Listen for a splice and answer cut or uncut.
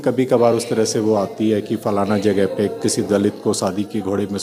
uncut